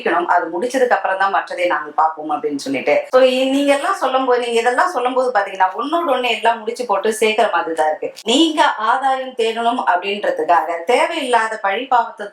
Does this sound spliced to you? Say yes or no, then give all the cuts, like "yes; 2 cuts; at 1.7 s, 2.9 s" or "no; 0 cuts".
no; 0 cuts